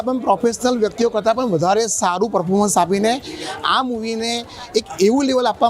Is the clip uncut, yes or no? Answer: yes